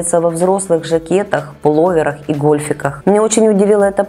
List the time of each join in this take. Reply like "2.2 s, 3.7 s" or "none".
2.9 s